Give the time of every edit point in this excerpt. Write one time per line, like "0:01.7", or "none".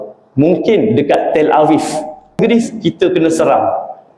0:02.4